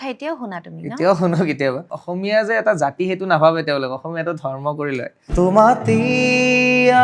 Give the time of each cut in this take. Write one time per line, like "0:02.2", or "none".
0:02.0
0:05.2